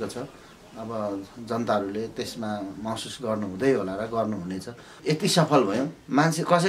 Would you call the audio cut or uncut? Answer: cut